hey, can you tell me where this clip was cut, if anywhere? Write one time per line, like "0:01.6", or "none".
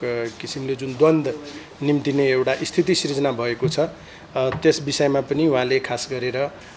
none